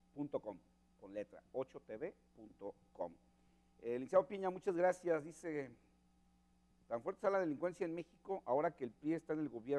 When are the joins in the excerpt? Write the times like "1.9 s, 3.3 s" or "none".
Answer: 8.6 s